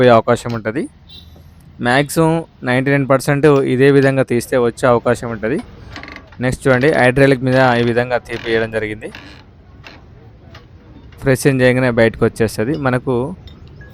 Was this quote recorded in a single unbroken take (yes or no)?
yes